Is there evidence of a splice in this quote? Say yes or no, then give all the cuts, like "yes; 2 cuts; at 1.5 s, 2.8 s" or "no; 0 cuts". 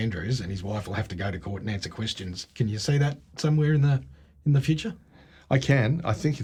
no; 0 cuts